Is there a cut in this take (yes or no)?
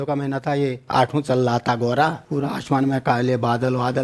yes